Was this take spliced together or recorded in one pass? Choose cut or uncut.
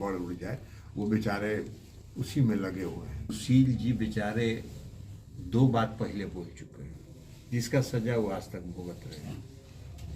cut